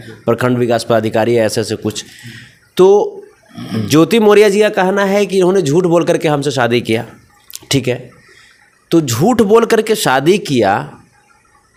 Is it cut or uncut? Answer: uncut